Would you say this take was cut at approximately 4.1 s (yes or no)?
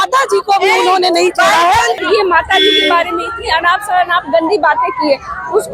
no